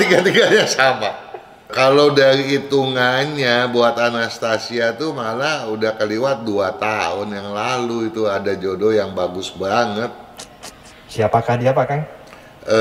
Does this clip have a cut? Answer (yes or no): yes